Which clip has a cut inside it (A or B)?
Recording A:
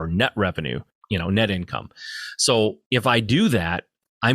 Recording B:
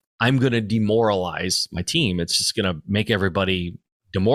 A